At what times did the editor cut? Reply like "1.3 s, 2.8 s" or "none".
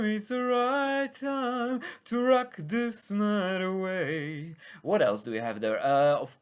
none